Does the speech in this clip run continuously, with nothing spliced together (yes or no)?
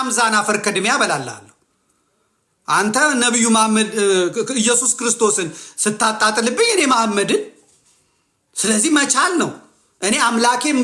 yes